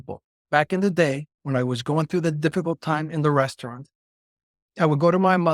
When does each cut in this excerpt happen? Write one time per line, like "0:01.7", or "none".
none